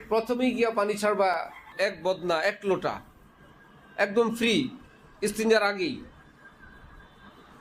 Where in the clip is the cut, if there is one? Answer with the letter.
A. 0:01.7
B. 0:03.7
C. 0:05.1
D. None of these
A